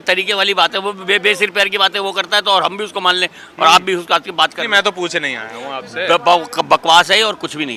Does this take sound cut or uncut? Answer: uncut